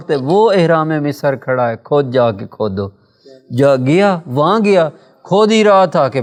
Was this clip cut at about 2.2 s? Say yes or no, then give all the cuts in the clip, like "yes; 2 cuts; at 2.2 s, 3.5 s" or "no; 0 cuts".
no; 0 cuts